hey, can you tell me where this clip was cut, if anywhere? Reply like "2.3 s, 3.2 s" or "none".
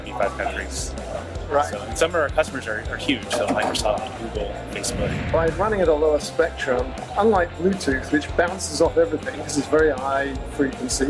5.2 s